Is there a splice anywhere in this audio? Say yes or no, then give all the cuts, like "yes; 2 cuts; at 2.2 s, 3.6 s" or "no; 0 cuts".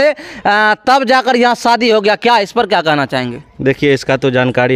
no; 0 cuts